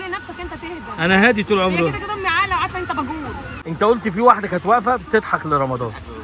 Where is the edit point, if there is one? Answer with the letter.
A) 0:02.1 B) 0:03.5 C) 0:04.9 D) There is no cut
B